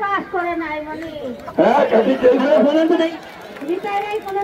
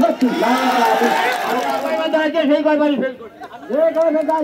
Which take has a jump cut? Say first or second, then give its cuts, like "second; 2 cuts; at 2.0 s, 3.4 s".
second; 1 cut; at 1.7 s